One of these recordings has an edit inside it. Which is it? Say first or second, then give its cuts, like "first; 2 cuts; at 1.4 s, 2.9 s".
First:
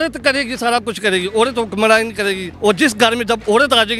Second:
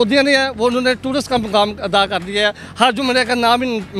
first; 1 cut; at 2.5 s